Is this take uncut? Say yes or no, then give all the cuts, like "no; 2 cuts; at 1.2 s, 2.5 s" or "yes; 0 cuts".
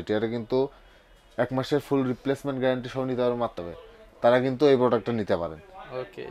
no; 1 cut; at 3.6 s